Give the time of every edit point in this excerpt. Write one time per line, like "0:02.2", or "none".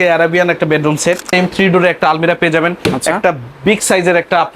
0:01.3